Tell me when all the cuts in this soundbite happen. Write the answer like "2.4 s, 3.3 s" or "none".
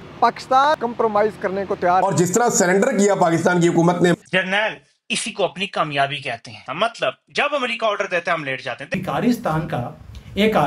0.8 s, 2.0 s, 4.2 s, 8.9 s

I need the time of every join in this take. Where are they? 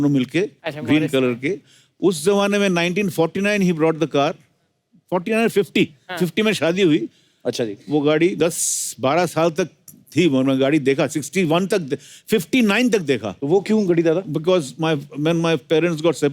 13.3 s

